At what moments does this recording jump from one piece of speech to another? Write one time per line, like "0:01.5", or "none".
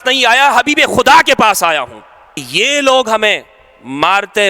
0:02.4